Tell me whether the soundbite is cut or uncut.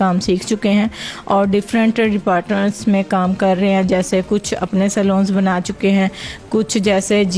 uncut